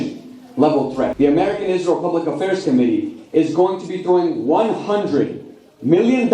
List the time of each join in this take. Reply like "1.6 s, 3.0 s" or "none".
1.1 s